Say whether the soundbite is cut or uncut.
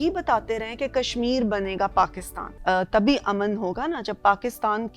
cut